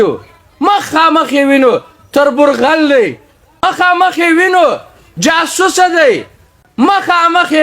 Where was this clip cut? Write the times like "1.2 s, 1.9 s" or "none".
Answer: 3.6 s